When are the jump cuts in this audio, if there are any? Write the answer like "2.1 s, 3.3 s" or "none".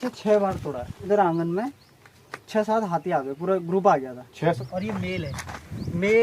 1.1 s, 4.6 s